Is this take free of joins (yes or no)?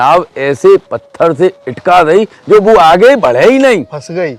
yes